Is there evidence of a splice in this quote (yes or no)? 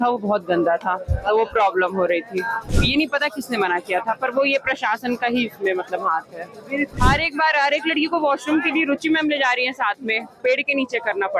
yes